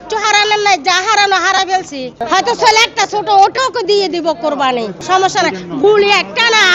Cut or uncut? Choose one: cut